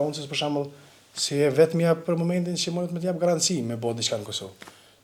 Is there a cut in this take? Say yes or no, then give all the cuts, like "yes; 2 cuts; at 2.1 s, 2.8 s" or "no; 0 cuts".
no; 0 cuts